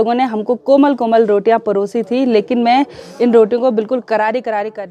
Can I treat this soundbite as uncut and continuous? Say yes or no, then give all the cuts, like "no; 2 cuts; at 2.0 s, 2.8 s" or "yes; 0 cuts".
yes; 0 cuts